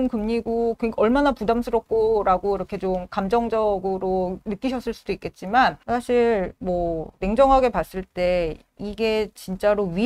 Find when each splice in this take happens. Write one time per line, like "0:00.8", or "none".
0:05.8